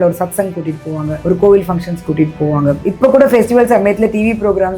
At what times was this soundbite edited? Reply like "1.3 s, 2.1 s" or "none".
1.1 s, 2.8 s